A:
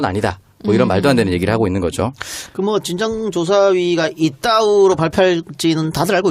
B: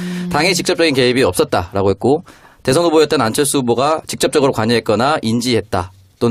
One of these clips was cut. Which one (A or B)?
A